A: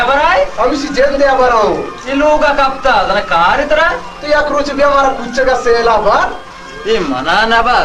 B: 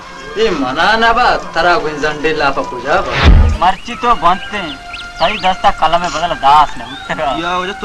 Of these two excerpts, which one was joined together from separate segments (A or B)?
B